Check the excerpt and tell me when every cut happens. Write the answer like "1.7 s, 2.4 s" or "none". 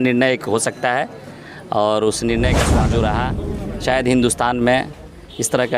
2.8 s